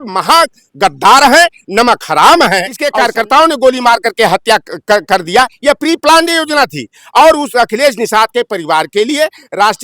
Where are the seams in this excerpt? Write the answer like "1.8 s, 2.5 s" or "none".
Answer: 2.8 s